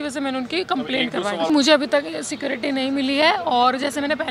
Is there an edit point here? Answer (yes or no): yes